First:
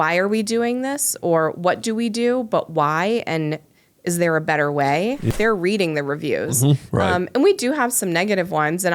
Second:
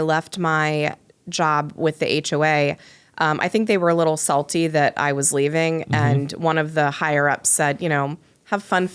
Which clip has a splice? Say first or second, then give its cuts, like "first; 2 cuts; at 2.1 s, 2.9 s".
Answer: first; 1 cut; at 5.3 s